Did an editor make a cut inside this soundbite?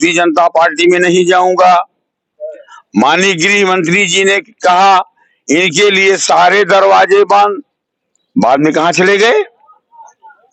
no; 0 cuts

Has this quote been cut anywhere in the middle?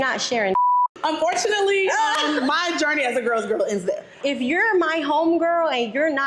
yes; 2 cuts; at 1.0 s, 4.1 s

